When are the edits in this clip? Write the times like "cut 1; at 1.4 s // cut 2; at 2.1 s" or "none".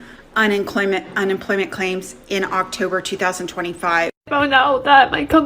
cut 1; at 4.3 s